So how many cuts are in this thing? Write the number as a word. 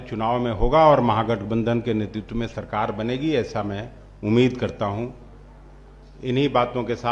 zero